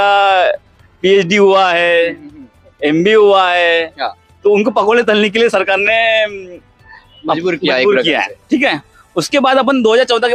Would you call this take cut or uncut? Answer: uncut